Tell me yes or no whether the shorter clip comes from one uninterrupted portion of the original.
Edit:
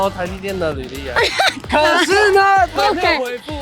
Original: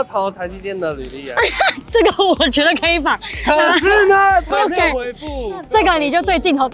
no